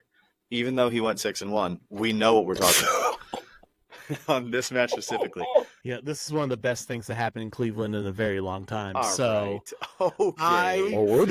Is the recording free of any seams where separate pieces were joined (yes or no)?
no